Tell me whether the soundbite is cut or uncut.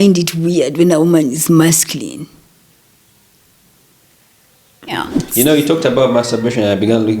cut